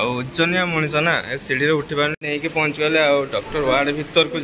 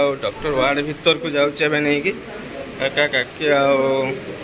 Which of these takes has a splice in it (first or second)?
first